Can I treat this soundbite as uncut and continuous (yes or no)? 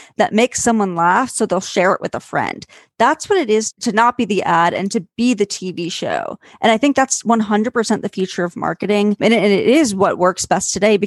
yes